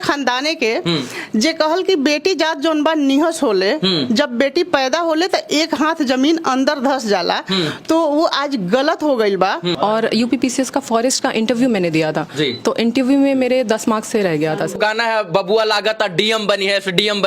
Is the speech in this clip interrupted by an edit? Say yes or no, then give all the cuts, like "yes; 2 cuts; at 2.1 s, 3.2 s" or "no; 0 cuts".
yes; 2 cuts; at 9.7 s, 14.8 s